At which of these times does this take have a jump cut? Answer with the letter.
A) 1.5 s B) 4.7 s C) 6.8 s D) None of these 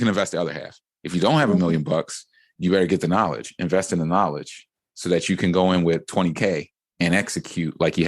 C